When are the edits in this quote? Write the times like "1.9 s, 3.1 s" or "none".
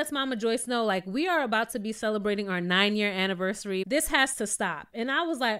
3.8 s